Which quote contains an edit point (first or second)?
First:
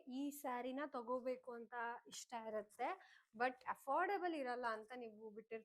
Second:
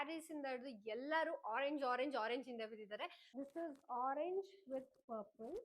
second